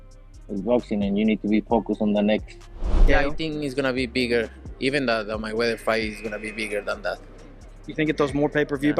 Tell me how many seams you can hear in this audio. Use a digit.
1